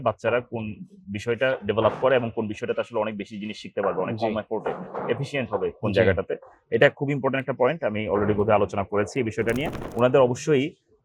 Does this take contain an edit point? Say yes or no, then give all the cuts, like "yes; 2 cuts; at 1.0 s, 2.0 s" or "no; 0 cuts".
yes; 1 cut; at 9.8 s